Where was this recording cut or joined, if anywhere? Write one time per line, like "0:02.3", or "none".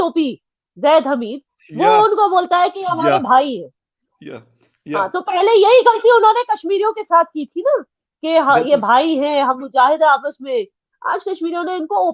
none